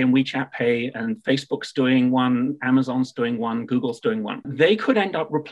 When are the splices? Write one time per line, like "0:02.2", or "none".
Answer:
0:04.5